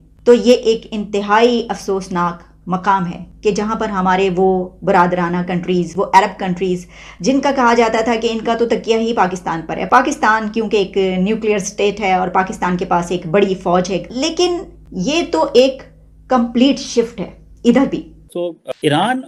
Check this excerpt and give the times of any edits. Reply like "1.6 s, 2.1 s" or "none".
none